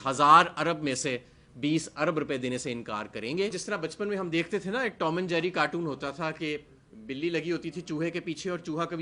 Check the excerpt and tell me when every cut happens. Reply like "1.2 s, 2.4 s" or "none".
3.6 s